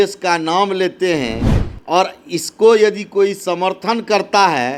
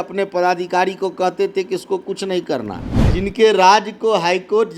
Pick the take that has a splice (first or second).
second